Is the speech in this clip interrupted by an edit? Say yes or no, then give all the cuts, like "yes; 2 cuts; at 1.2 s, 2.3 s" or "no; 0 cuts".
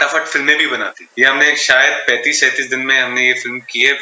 yes; 1 cut; at 1.0 s